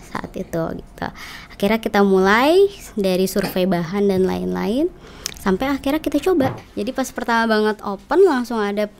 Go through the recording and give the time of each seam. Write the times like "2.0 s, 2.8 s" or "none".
6.6 s